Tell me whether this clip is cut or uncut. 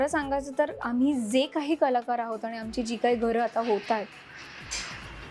uncut